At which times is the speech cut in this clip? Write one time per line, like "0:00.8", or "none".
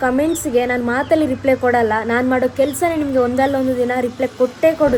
none